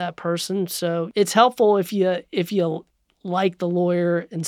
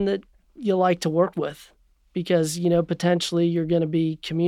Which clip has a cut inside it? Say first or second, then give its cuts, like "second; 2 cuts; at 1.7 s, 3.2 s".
first; 1 cut; at 1.1 s